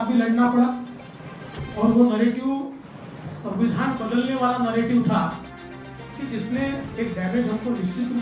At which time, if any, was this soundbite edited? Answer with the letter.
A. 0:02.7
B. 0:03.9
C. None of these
C